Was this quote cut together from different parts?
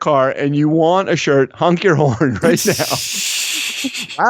no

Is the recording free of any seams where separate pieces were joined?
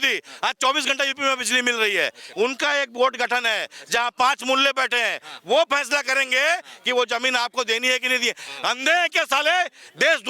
no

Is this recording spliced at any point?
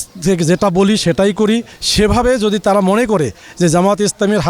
no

